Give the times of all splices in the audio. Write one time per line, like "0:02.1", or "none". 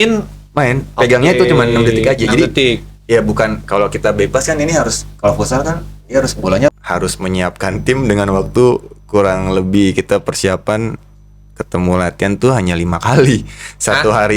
0:06.8